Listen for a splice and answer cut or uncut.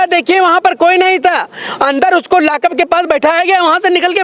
uncut